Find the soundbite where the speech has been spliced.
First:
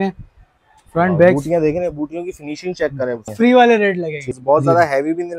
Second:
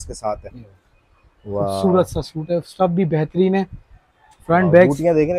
first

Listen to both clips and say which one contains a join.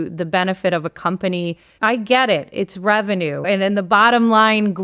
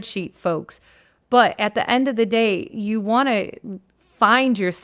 first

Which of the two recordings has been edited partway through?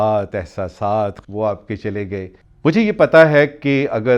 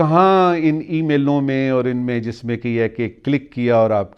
first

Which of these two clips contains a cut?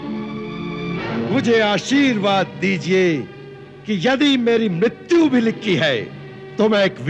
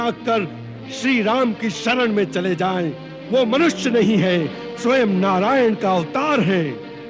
first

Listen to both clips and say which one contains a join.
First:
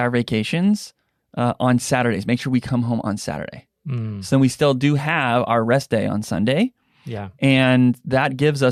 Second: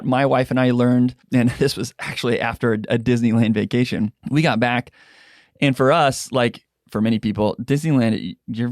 second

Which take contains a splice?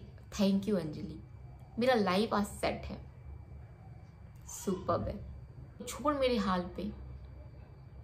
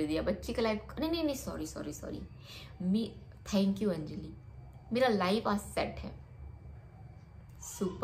first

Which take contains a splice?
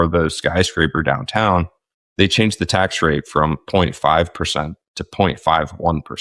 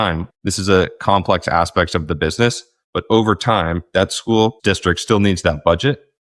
second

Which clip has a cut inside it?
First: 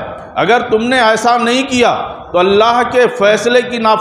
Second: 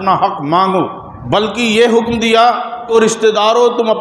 second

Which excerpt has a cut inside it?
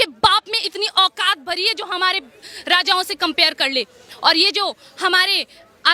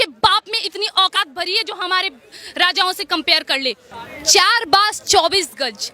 second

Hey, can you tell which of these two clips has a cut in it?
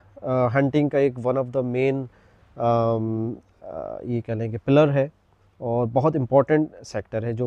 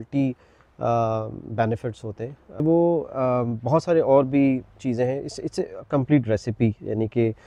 second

